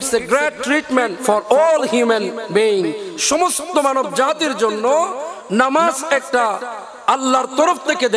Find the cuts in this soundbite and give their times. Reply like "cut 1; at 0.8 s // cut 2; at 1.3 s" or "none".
cut 1; at 1.2 s